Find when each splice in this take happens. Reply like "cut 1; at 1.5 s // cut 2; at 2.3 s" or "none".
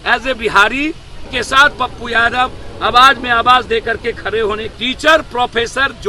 cut 1; at 1.3 s // cut 2; at 4.7 s